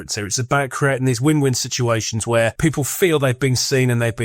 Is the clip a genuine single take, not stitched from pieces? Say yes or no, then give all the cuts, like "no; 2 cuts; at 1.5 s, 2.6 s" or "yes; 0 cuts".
no; 1 cut; at 2.6 s